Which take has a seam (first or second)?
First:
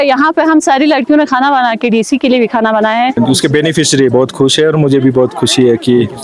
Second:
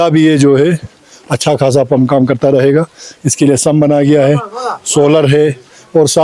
first